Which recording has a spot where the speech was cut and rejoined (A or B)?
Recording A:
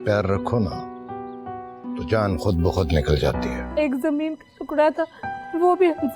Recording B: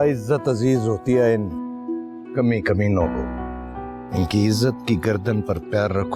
A